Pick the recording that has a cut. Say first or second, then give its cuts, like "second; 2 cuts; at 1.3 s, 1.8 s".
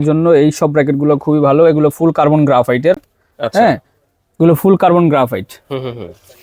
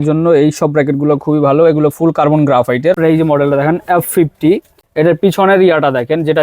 second; 2 cuts; at 3.0 s, 4.7 s